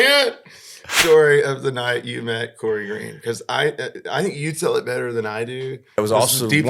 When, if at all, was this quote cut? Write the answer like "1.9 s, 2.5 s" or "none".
0.9 s, 6.0 s